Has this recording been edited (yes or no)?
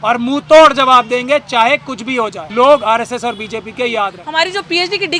yes